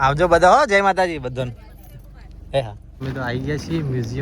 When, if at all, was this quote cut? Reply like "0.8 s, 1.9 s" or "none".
2.9 s